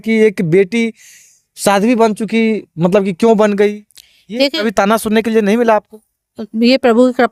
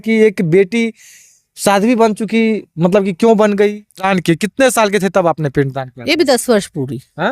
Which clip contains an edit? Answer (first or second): second